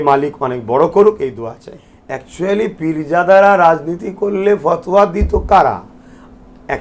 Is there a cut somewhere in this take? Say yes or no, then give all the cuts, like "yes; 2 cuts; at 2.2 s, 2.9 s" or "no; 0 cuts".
no; 0 cuts